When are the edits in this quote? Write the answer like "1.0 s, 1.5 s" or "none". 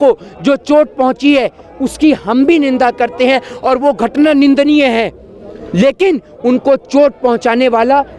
none